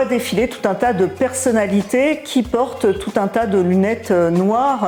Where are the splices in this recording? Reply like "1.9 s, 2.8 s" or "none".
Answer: none